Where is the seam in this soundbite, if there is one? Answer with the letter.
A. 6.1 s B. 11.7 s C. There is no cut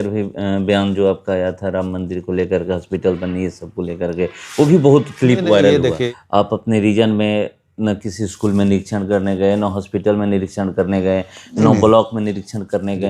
A